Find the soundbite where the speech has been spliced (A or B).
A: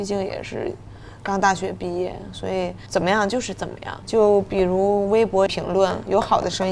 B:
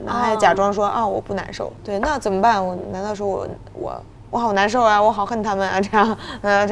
A